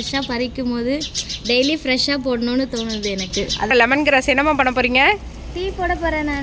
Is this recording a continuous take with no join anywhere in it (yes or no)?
no